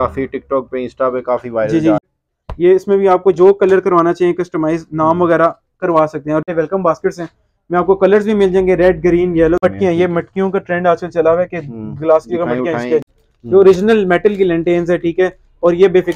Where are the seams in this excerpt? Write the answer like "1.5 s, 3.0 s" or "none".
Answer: 2.0 s, 6.5 s, 9.6 s, 13.2 s